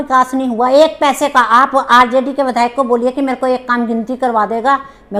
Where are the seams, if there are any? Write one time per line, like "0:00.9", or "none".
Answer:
none